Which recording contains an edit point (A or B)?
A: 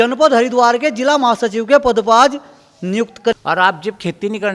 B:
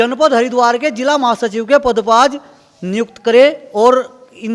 A